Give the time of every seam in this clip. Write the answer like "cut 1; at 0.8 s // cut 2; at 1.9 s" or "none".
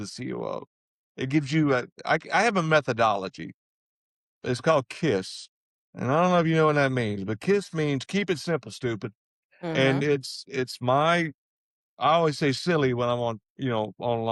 none